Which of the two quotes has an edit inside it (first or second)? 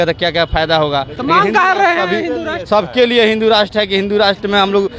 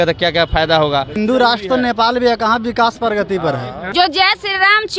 second